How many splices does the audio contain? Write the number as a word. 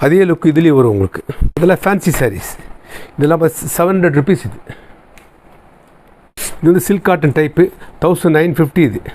two